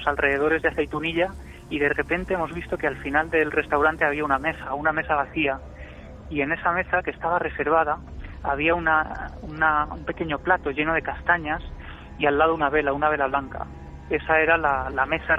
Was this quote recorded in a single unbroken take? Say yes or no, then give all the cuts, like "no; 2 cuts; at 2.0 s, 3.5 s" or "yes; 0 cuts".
yes; 0 cuts